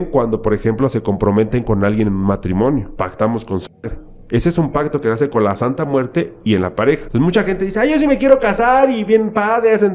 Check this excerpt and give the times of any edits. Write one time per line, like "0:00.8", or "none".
0:02.9
0:07.1